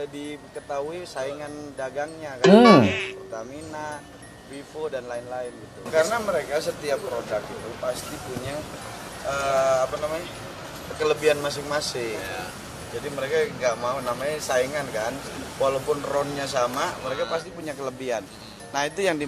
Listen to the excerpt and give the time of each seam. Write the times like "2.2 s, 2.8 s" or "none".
none